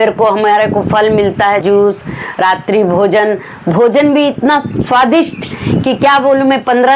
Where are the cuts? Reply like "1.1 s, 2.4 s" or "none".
1.6 s